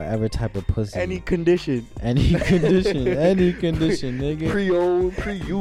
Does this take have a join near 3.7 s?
no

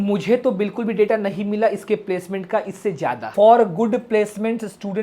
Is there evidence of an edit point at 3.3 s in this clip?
yes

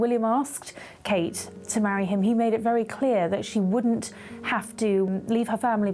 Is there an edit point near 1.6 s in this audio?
yes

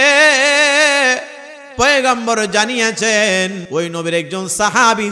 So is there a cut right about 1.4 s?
no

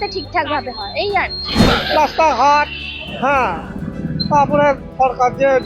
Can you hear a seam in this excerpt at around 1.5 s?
yes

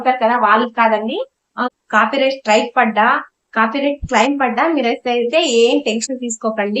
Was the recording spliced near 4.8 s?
no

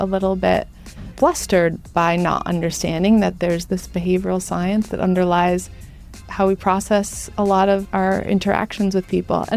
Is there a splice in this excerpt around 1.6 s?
no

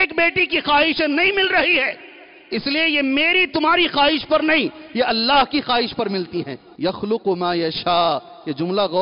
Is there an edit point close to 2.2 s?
no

